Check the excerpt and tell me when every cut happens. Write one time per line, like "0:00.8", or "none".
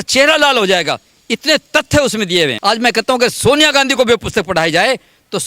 0:02.6

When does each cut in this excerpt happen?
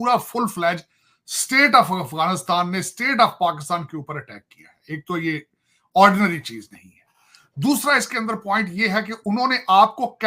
none

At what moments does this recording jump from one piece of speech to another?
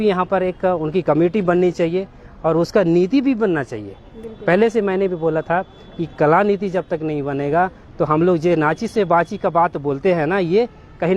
none

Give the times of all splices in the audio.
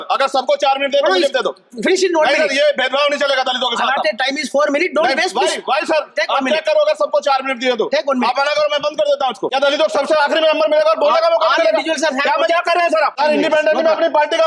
0:09.5
0:13.2

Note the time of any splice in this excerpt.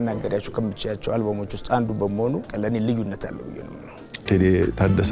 0:02.5
0:04.2

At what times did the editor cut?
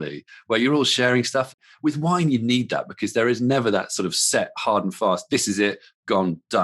0:01.6

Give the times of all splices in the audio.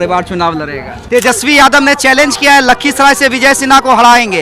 0:01.0

